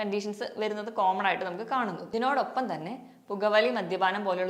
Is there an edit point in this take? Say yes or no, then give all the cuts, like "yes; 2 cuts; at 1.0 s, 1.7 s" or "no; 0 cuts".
yes; 1 cut; at 2.0 s